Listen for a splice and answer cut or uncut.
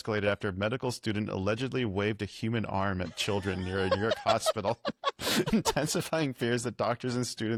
uncut